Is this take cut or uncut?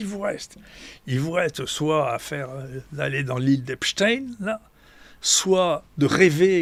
uncut